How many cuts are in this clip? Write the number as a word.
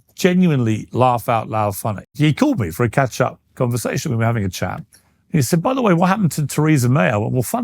one